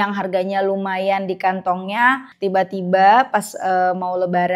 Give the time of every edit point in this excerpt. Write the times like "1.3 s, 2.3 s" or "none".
2.3 s

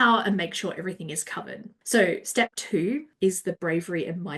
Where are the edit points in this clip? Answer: 1.7 s, 3.1 s

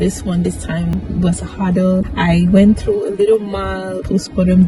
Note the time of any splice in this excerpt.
1.0 s

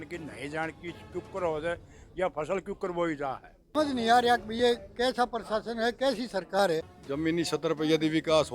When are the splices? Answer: 3.7 s, 7.0 s

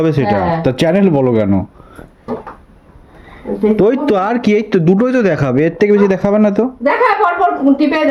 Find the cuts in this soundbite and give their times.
none

